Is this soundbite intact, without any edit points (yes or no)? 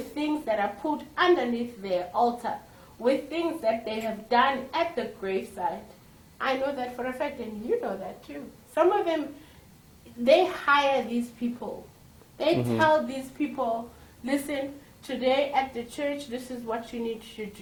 yes